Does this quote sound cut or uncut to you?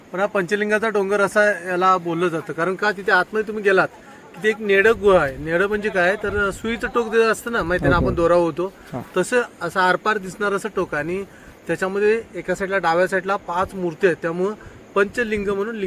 uncut